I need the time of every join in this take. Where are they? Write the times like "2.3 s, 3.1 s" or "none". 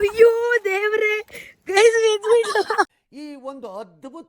2.9 s